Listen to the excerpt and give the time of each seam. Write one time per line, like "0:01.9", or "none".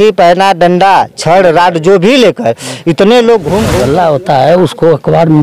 0:03.7